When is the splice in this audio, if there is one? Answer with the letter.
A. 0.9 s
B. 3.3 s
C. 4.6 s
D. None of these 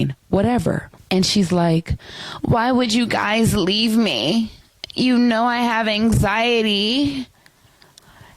A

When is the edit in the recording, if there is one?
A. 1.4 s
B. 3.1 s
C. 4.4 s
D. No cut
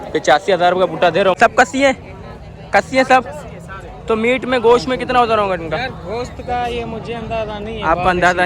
A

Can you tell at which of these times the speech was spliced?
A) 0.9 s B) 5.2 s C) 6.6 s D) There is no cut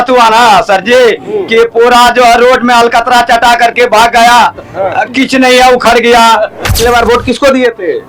C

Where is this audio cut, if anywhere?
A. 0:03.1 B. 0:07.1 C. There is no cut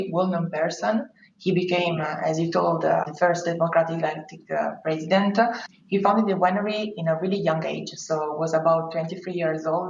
A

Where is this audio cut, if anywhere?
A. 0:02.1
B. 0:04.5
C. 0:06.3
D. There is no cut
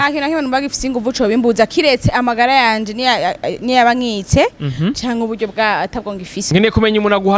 C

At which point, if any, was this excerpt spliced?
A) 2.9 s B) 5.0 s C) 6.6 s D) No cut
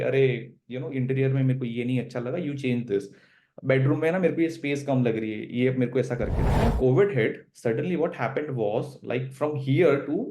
C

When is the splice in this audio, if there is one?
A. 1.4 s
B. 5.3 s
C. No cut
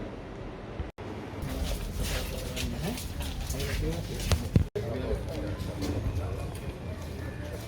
A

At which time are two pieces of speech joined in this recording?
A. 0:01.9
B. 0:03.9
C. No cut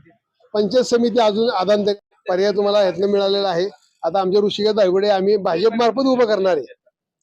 A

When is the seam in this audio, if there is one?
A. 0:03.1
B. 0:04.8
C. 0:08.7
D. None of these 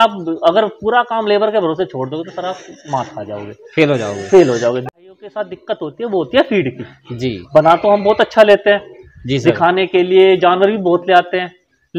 B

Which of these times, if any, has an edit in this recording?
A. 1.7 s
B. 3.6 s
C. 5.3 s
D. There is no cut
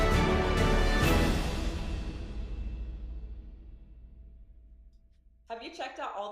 C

